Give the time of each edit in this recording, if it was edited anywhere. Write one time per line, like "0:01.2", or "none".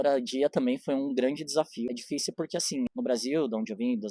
0:02.0
0:02.9

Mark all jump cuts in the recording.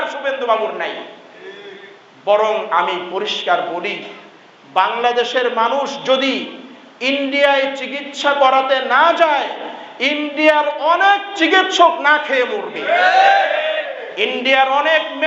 none

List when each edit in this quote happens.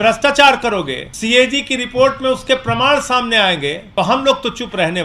0:01.0
0:03.8

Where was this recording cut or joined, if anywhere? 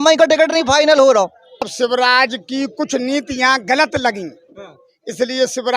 0:01.6

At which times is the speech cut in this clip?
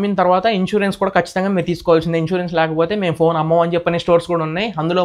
none

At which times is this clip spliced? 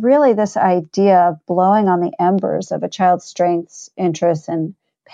none

